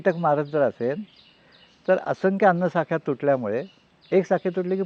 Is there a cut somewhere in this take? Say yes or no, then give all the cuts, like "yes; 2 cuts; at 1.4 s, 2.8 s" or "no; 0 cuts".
no; 0 cuts